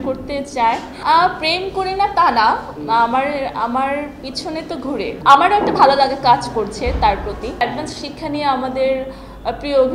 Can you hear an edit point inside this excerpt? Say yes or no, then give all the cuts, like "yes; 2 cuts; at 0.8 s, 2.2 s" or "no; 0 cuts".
yes; 3 cuts; at 0.9 s, 5.1 s, 7.6 s